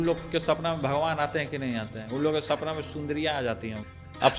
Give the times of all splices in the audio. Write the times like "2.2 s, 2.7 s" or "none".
none